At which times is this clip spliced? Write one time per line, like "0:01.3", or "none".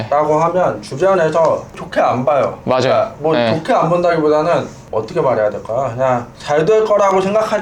0:01.8
0:04.8
0:06.3